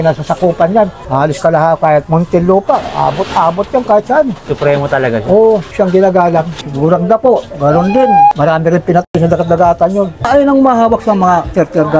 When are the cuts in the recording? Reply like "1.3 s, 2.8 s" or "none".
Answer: 4.4 s, 5.7 s, 6.6 s, 8.3 s, 10.2 s